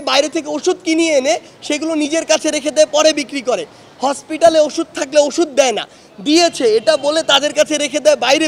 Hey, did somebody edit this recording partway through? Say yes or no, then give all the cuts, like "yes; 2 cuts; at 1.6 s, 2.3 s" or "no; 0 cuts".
no; 0 cuts